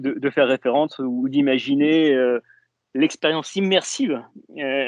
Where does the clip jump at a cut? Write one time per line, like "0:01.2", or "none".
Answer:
none